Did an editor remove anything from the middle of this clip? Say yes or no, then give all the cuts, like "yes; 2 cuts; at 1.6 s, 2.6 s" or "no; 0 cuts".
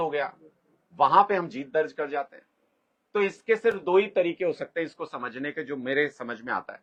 no; 0 cuts